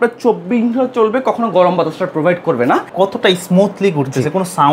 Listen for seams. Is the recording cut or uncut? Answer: cut